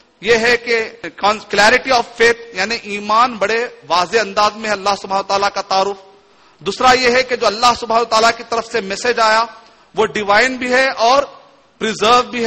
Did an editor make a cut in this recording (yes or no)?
yes